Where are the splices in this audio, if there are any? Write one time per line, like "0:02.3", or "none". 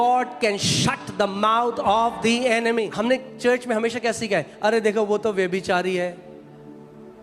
0:02.9